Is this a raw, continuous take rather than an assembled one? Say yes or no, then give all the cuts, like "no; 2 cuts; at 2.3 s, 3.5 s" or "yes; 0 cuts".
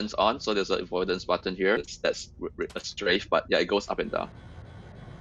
no; 1 cut; at 1.9 s